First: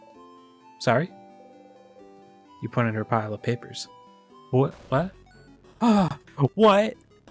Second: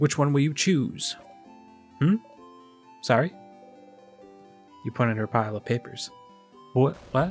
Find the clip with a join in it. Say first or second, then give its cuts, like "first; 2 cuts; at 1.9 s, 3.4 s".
first; 1 cut; at 6.2 s